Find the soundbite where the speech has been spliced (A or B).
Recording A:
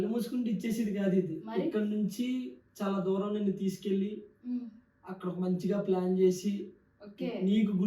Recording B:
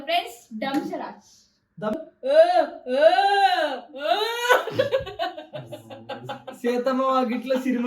B